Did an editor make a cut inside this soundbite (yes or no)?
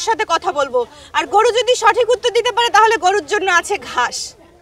no